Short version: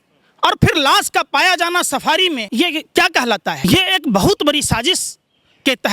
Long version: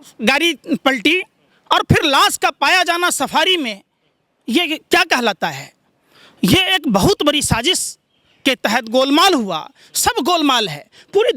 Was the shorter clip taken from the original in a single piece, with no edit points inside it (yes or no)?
no